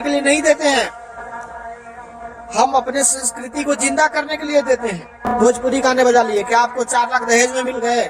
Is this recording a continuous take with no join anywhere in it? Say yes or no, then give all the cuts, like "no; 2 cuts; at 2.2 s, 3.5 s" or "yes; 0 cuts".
no; 1 cut; at 5.3 s